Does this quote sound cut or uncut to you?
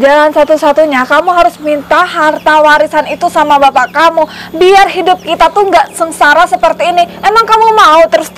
uncut